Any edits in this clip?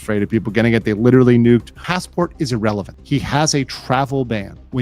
yes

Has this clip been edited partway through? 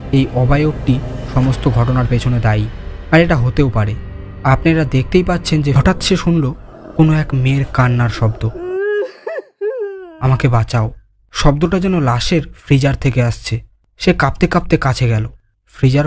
yes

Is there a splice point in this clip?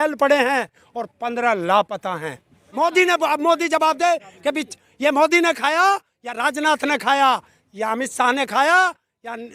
yes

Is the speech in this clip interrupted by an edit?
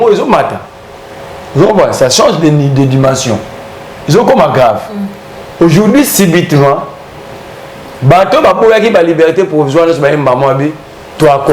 no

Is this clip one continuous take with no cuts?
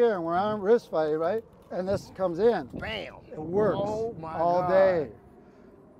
yes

